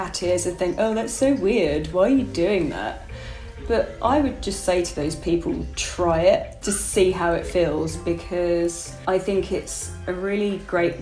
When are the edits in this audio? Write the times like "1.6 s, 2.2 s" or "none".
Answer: 8.9 s